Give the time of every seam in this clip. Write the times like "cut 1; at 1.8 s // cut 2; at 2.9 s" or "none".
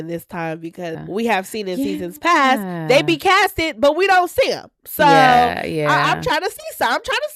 cut 1; at 0.9 s